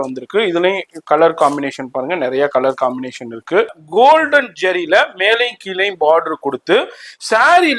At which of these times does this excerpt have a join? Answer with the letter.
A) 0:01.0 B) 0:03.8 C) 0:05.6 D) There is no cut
B